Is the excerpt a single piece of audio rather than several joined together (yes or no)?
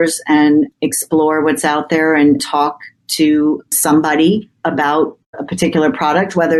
yes